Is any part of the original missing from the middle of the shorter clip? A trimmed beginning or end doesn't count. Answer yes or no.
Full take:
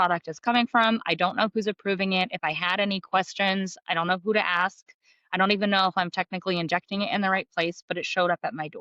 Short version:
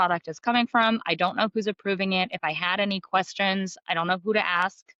no